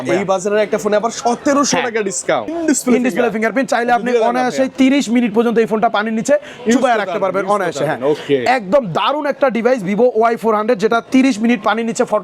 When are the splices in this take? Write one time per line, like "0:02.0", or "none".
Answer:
0:02.5